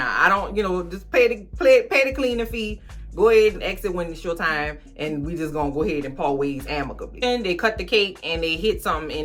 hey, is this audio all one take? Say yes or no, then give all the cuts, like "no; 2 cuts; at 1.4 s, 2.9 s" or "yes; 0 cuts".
no; 1 cut; at 7.2 s